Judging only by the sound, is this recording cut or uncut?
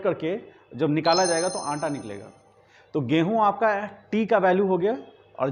uncut